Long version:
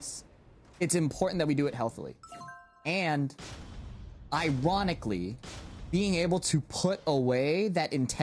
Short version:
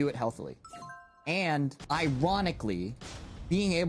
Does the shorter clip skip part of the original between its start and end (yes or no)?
yes